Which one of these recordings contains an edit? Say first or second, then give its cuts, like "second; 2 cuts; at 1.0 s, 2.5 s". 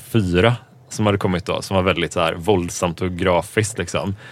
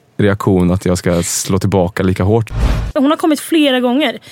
second; 1 cut; at 2.8 s